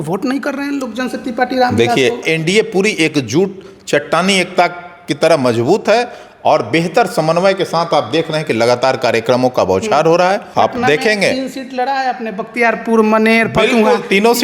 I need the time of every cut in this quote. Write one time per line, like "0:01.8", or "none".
0:02.2
0:10.5